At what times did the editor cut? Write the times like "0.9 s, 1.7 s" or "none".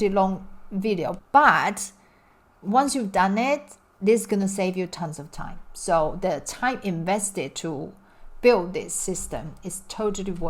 1.2 s